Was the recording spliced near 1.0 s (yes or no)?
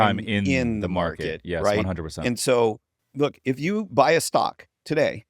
no